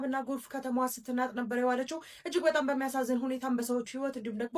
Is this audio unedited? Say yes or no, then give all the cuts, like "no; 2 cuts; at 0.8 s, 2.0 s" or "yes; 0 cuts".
yes; 0 cuts